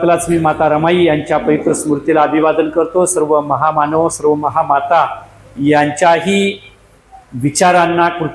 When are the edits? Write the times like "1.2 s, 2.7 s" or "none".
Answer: none